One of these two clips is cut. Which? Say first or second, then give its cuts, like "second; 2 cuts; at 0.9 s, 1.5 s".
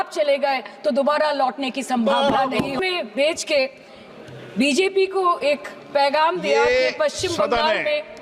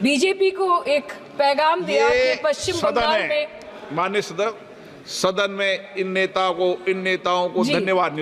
first; 1 cut; at 2.8 s